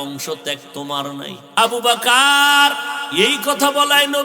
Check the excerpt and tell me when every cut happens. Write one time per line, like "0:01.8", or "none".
0:01.4
0:03.0